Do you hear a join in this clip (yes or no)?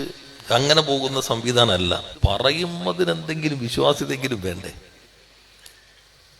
yes